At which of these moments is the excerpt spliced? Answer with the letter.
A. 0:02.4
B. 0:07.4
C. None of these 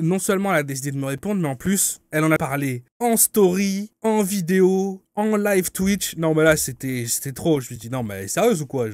A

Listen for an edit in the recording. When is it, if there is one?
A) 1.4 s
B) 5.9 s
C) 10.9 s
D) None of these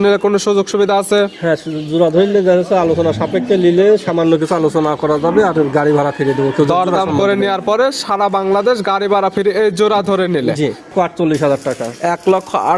C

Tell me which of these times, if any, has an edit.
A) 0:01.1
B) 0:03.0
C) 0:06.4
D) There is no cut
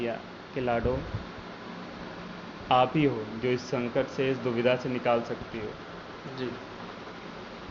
D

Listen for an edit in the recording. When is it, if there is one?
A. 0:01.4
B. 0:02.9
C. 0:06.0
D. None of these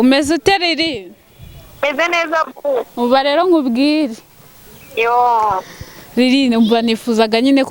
B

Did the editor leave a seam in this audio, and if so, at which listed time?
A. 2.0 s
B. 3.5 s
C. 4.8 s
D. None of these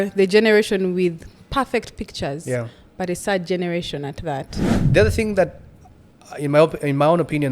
C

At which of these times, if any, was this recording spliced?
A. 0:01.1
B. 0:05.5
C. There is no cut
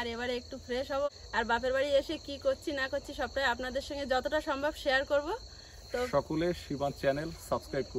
A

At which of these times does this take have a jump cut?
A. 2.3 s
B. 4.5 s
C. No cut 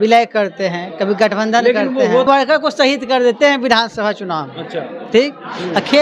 A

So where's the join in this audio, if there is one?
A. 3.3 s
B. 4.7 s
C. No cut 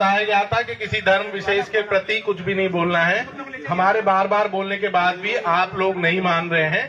C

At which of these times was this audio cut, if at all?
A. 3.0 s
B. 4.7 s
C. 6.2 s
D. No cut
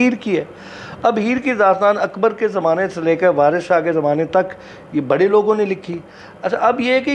D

